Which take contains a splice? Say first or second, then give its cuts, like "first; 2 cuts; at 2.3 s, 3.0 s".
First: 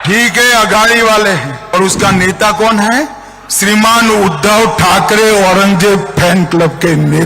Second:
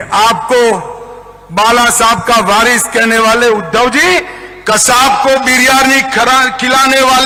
first; 1 cut; at 1.6 s